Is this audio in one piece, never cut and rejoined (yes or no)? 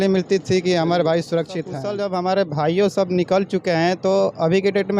no